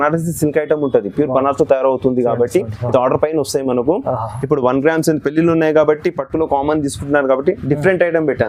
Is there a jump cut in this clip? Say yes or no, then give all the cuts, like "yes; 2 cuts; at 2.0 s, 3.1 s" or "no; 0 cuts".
no; 0 cuts